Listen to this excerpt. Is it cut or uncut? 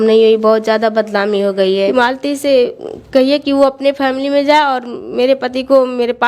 cut